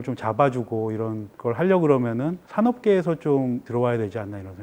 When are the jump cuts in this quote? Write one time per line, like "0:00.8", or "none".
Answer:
0:01.3
0:02.4
0:03.7